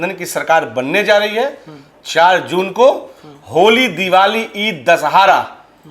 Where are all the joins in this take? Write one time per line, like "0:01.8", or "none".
none